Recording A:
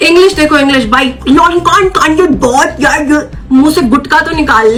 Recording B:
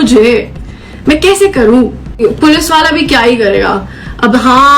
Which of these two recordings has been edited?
B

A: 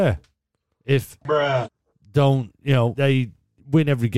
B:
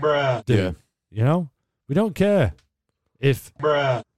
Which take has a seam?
A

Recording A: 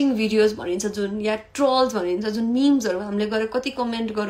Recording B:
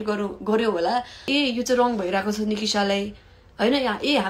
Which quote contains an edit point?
B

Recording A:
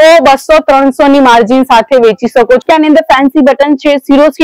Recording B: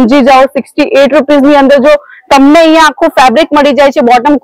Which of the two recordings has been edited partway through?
A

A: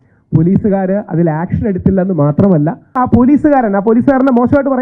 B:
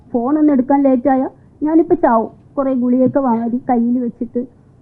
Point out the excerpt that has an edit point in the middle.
A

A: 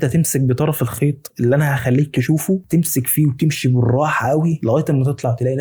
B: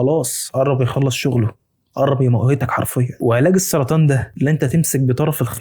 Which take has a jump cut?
B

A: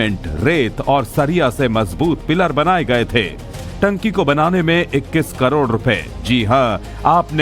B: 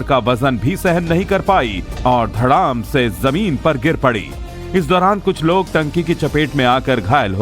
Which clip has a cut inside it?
B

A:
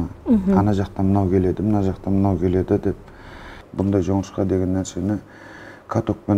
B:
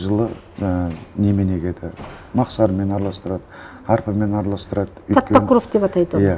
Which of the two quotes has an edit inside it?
A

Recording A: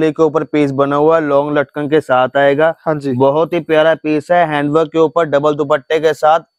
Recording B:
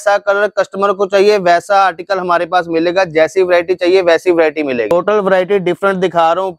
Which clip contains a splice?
B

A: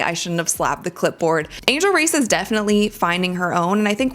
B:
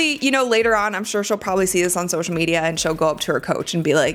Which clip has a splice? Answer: A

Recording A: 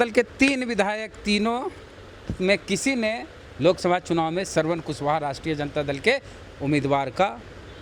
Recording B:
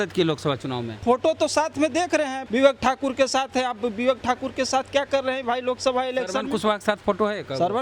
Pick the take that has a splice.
B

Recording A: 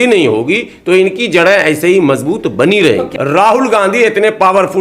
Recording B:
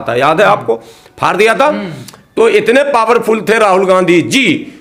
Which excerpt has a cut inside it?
A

